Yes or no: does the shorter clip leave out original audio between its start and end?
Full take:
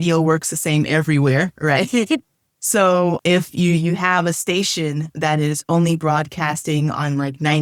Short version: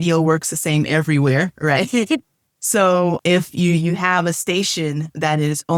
no